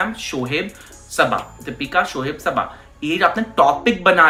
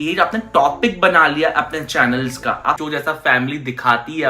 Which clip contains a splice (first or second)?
second